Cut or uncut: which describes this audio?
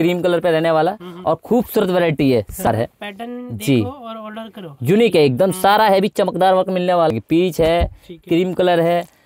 cut